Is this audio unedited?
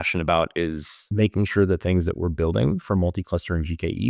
no; 1 cut; at 1.0 s

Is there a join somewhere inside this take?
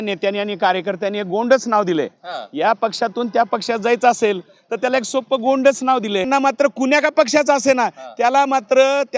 yes; 1 cut; at 6.3 s

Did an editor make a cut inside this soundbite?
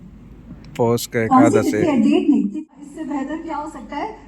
yes; 1 cut; at 2.5 s

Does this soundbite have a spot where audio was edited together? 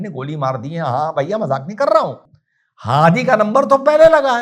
no; 0 cuts

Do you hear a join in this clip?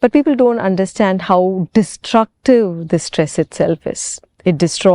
no; 0 cuts

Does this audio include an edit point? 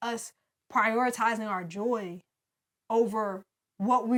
no; 0 cuts

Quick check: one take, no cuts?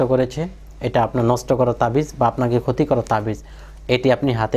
yes; 0 cuts

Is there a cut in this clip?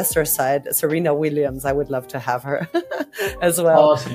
no; 0 cuts

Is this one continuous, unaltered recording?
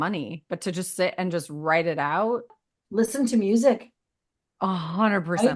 no; 1 cut; at 2.6 s

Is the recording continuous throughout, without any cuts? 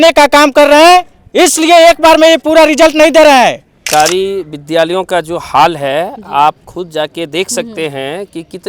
no; 1 cut; at 3.7 s

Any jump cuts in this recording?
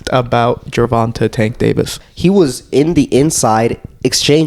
yes; 1 cut; at 2.0 s

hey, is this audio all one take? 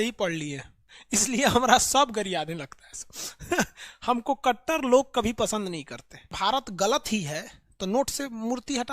no; 2 cuts; at 0.9 s, 6.3 s

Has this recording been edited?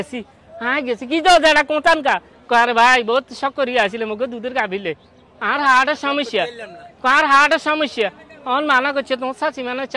no; 0 cuts

